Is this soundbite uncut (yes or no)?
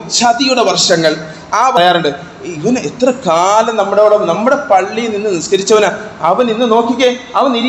no